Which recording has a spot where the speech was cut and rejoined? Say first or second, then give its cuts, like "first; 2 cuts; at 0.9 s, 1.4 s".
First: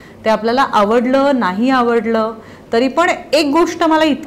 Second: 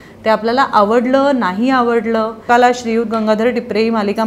second; 1 cut; at 2.5 s